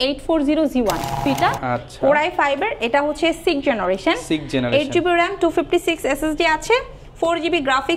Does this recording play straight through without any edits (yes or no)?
no